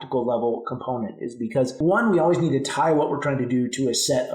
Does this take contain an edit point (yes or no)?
yes